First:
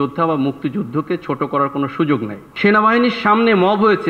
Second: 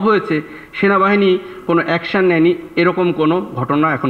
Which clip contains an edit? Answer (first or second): first